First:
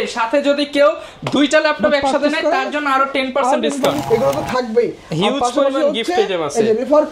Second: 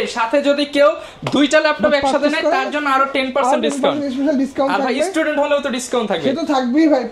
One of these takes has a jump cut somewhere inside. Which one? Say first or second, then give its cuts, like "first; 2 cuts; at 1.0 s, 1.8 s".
first; 1 cut; at 4.0 s